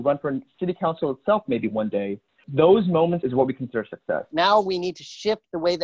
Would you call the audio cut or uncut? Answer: cut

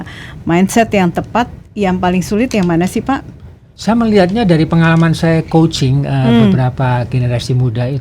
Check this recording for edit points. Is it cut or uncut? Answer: uncut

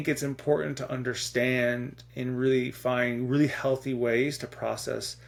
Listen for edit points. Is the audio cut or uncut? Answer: uncut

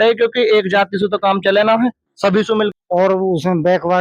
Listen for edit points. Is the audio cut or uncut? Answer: cut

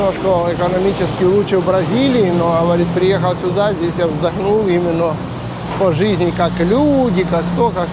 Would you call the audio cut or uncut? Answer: uncut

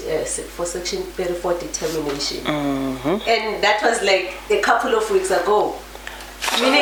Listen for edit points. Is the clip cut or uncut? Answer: uncut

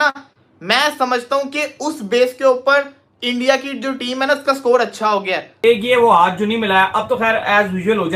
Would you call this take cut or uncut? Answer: cut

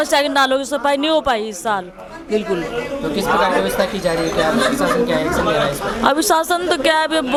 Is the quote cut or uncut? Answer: uncut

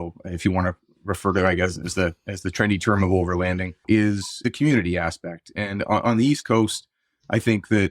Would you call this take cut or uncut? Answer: cut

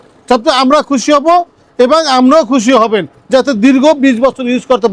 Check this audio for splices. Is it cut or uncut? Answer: uncut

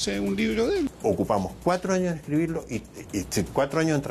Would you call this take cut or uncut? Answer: cut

